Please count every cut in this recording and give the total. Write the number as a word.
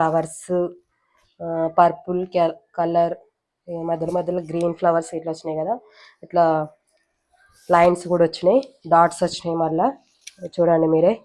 zero